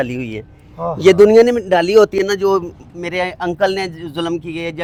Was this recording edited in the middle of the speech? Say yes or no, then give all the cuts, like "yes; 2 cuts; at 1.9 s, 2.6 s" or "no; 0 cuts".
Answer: no; 0 cuts